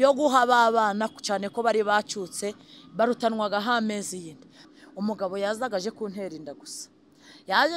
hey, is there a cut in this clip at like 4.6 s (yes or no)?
yes